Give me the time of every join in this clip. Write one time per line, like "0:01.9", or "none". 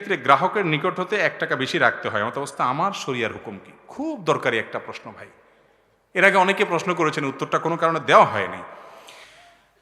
none